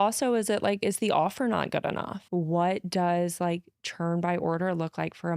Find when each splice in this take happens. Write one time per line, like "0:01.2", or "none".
0:02.1